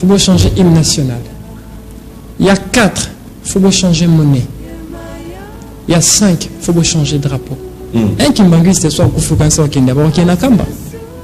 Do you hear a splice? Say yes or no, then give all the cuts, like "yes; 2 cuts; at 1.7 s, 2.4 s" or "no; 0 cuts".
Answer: yes; 1 cut; at 7.7 s